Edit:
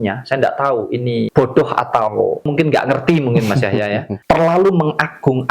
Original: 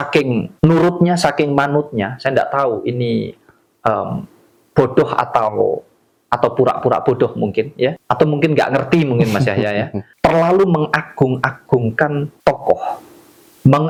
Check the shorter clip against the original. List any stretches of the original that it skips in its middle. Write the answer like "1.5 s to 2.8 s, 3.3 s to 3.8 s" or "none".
3.2 s to 4.7 s, 5.9 s to 8.3 s, 10.0 s to 10.1 s